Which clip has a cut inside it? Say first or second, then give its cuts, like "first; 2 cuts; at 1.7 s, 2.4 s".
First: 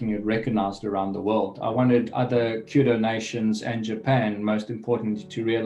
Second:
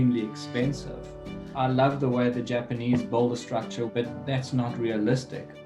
second; 2 cuts; at 1.5 s, 3.9 s